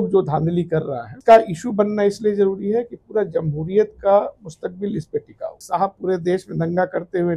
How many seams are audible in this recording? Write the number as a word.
two